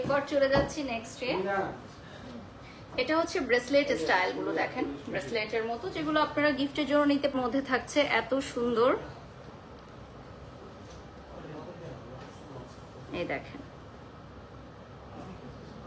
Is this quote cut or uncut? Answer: cut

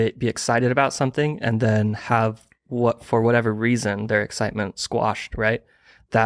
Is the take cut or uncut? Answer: uncut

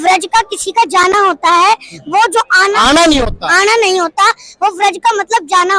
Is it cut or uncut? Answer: uncut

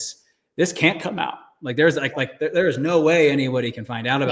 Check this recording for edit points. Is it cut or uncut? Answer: uncut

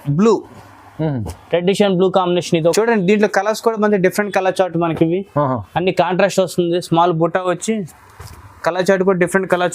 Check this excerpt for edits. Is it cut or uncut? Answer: cut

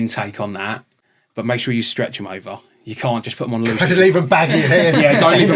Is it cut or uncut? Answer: uncut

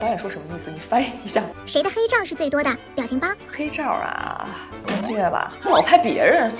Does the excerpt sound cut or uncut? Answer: cut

